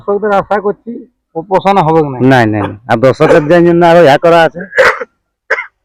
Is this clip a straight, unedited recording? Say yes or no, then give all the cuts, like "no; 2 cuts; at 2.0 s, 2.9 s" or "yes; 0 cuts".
yes; 0 cuts